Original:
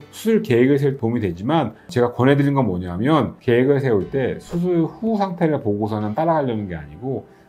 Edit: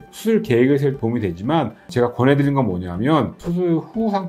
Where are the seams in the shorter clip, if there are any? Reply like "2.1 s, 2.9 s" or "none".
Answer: 3.4 s